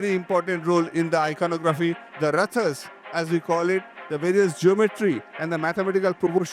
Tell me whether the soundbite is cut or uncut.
cut